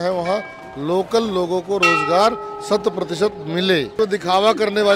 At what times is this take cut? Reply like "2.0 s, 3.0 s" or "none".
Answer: 3.9 s

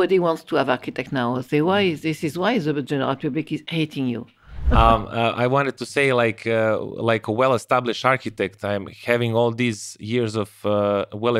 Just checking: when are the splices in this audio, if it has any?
4.7 s

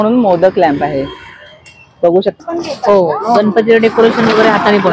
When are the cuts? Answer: 2.4 s

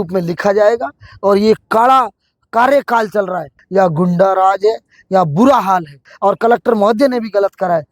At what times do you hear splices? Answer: 3.5 s, 6.1 s

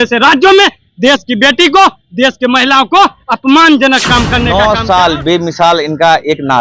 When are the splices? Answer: 4.5 s

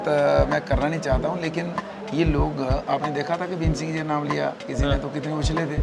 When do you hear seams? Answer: none

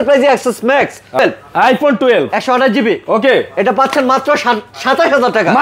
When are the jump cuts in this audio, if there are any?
1.2 s

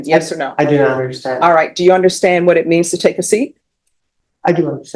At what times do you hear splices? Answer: none

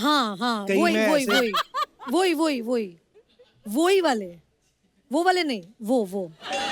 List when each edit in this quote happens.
none

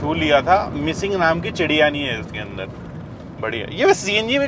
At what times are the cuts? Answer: none

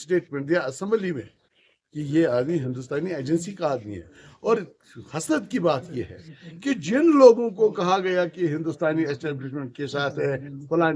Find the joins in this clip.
none

